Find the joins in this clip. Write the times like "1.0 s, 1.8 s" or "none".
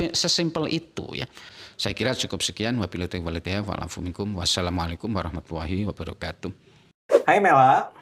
none